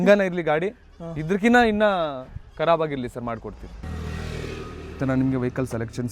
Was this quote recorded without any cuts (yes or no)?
no